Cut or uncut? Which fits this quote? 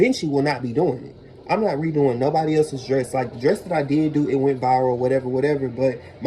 uncut